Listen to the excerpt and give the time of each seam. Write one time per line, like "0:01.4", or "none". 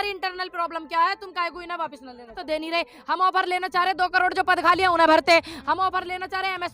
0:02.4